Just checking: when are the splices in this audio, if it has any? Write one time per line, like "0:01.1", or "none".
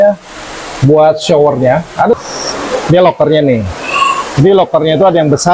0:02.2